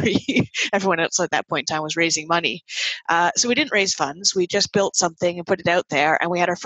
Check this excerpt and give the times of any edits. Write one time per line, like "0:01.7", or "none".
none